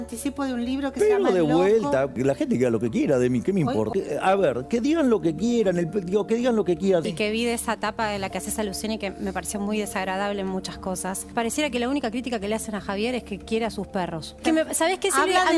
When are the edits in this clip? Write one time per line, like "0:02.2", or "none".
0:02.1
0:03.9
0:07.1
0:11.3
0:14.4